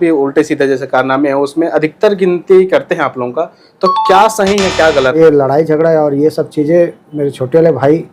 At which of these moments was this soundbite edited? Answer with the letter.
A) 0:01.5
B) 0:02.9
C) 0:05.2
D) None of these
C